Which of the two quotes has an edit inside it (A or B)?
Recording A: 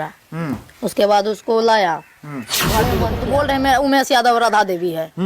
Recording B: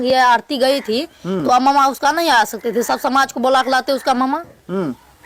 A